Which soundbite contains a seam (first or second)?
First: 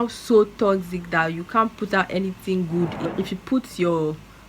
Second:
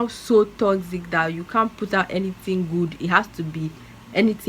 first